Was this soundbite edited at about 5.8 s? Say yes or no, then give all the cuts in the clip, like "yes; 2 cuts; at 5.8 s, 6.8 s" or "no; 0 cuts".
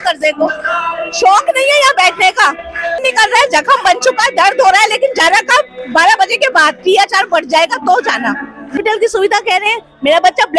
no; 2 cuts; at 3.0 s, 8.7 s